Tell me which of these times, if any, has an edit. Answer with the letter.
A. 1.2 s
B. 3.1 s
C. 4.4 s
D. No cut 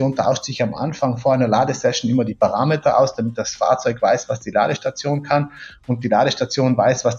A